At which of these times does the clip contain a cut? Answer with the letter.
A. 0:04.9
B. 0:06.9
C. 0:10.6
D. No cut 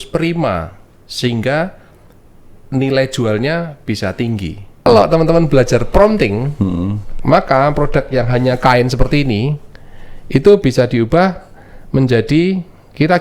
A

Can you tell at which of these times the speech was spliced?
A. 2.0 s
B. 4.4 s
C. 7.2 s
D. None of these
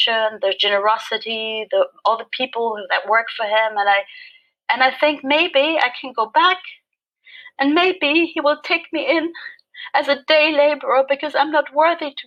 D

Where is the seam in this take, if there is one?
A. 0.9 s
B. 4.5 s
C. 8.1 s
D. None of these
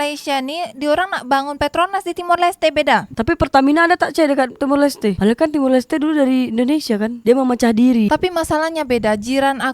C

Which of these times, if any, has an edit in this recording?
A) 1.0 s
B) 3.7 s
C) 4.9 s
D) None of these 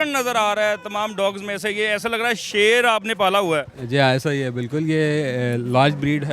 D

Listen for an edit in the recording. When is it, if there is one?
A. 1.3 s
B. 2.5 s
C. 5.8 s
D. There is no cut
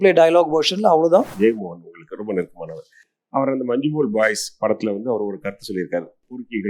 A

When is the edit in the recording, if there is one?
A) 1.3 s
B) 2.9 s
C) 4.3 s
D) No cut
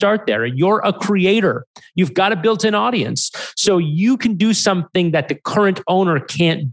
D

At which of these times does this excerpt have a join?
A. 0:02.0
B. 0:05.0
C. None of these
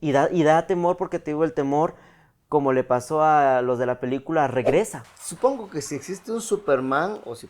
B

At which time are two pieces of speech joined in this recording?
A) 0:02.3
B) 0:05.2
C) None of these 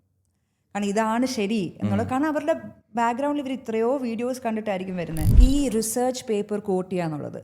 B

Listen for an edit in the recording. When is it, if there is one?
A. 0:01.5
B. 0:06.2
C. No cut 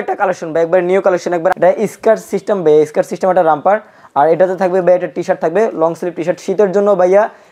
A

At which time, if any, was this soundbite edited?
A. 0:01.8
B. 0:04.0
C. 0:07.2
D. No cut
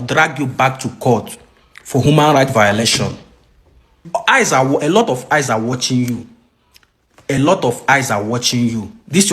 B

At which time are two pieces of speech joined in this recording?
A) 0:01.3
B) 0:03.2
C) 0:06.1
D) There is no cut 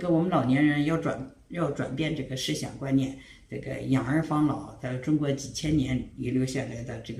D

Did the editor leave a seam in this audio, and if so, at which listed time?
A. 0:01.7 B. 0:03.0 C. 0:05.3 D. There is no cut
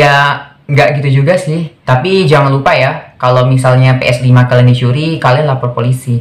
A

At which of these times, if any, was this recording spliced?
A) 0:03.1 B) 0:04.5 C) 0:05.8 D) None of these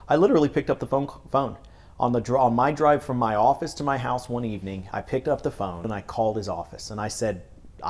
C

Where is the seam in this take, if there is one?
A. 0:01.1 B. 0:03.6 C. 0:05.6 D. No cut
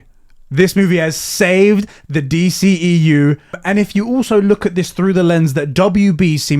B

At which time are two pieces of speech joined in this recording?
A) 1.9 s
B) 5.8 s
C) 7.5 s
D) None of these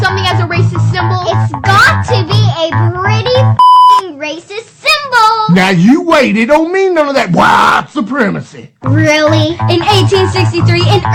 B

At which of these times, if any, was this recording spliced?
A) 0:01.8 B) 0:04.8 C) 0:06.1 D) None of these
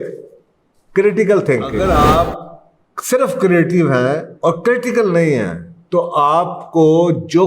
A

